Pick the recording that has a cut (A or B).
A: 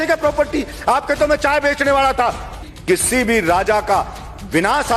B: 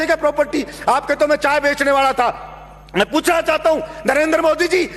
A